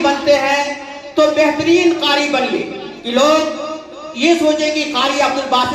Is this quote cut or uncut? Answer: uncut